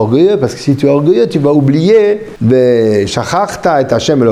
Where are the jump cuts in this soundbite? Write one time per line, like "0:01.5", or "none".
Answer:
0:02.3